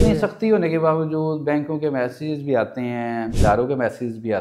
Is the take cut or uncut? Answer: cut